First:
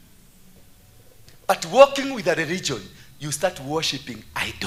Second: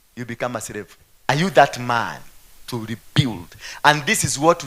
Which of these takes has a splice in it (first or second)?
second